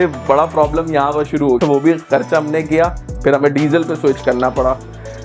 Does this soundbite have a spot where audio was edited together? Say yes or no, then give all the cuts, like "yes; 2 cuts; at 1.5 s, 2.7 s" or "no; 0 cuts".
yes; 2 cuts; at 1.6 s, 3.1 s